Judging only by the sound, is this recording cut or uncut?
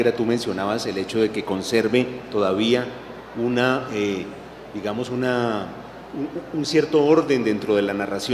cut